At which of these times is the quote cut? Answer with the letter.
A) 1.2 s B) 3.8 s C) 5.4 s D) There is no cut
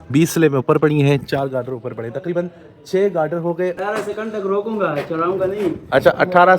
B